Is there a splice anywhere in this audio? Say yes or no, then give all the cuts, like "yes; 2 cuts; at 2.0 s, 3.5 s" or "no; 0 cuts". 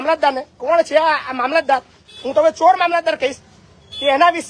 no; 0 cuts